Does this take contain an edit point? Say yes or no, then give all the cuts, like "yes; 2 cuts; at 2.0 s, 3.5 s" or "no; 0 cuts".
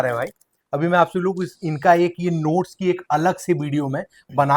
no; 0 cuts